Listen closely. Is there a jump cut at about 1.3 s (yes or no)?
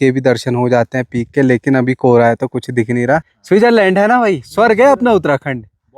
no